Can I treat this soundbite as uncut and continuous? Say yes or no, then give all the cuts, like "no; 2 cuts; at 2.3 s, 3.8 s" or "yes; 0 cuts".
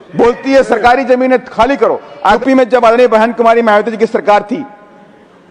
no; 1 cut; at 2.4 s